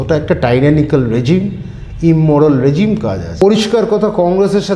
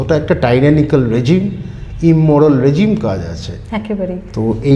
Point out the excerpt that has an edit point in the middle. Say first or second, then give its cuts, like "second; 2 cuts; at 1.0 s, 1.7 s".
first; 1 cut; at 3.2 s